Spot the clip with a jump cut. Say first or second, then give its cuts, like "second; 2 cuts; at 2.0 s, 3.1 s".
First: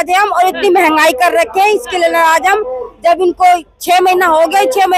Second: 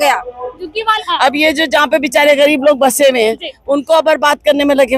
second; 1 cut; at 0.9 s